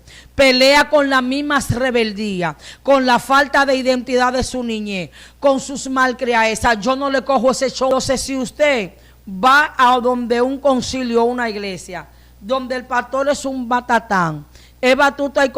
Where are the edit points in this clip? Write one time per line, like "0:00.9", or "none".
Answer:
0:07.9